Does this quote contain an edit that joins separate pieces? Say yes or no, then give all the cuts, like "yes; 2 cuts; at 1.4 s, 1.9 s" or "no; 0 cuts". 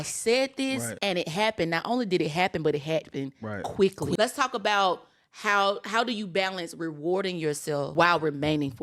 yes; 3 cuts; at 0.9 s, 4.2 s, 7.9 s